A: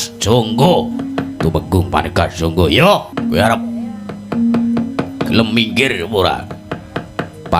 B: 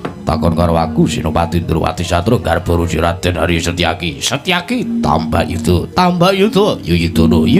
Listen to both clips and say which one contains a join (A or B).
A